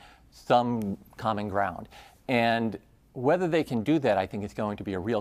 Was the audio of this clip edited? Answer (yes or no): yes